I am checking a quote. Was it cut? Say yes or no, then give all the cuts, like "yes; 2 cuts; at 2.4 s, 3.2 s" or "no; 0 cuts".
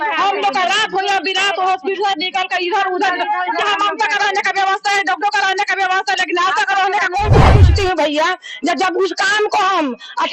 yes; 1 cut; at 7.5 s